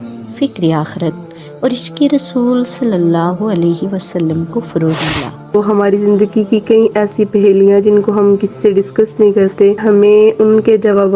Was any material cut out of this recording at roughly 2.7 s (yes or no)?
no